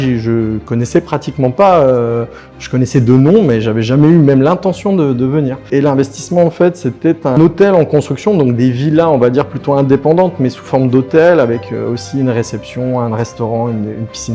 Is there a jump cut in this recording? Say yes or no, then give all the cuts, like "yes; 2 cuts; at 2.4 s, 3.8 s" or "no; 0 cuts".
yes; 2 cuts; at 5.7 s, 7.4 s